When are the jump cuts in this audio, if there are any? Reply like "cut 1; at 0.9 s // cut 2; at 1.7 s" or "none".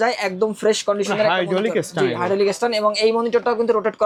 none